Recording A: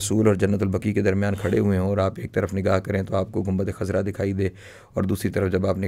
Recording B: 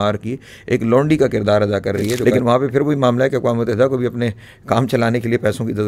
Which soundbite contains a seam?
B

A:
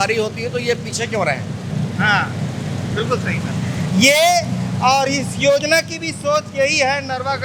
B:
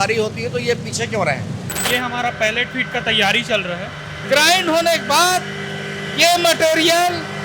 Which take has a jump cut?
B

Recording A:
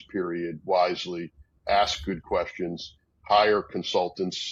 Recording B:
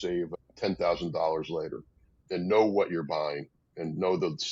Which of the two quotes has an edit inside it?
B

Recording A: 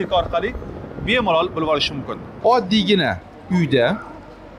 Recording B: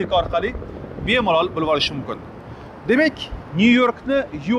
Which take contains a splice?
A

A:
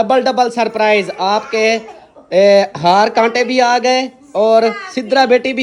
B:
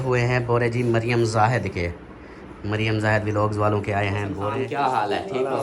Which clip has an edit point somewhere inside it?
B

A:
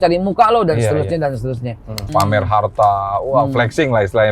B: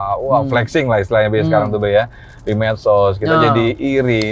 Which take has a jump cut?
A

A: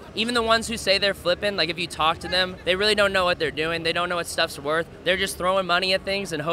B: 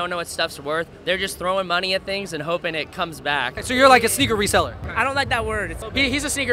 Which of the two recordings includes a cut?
B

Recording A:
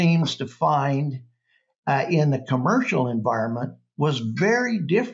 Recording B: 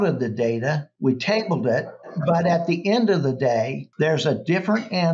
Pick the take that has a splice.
B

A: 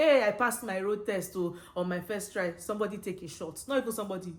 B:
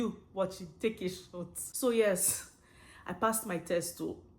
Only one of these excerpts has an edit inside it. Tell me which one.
B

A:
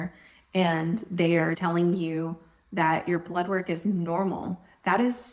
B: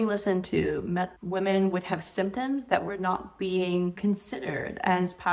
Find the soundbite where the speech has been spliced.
A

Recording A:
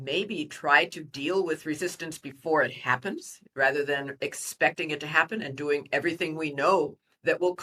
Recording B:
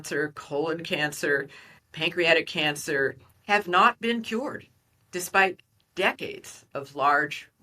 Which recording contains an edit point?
B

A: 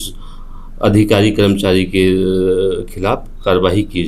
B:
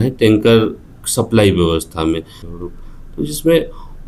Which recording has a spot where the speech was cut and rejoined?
B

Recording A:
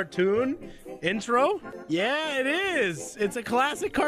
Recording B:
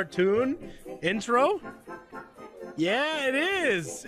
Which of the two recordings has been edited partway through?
A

